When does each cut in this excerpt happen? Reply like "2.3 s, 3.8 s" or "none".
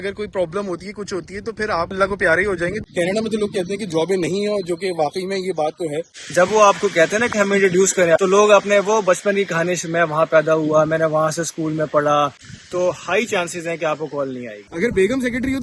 2.8 s, 6.1 s, 8.2 s, 12.4 s, 14.7 s